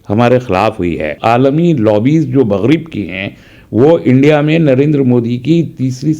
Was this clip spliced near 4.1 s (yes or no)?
no